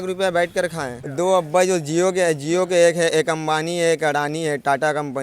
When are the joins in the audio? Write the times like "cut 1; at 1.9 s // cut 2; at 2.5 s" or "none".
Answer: cut 1; at 1.0 s